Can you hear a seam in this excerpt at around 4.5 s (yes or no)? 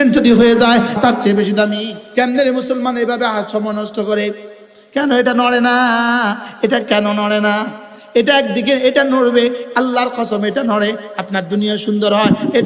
no